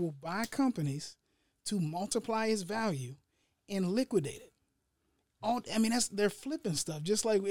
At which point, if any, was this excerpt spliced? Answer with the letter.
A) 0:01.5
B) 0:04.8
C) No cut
C